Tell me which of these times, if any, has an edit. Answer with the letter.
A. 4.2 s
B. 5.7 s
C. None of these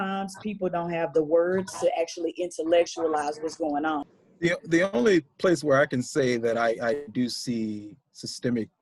A